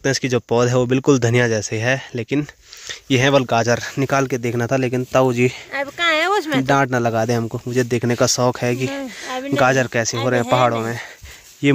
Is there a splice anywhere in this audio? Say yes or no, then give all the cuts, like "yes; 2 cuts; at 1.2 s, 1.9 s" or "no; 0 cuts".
no; 0 cuts